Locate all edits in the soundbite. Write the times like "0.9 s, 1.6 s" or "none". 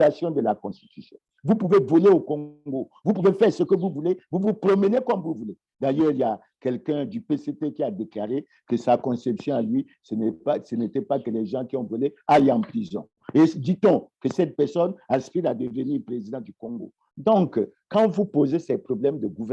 17.1 s